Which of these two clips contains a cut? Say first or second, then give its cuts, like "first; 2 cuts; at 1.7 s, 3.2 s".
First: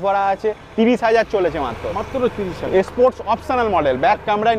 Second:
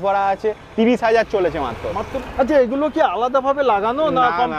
second; 1 cut; at 2.1 s